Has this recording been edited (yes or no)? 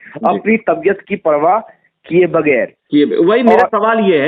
no